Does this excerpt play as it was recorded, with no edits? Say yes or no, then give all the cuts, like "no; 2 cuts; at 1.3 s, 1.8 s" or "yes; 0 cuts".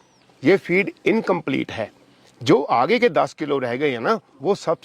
yes; 0 cuts